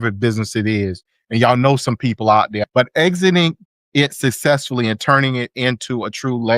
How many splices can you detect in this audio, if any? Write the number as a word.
one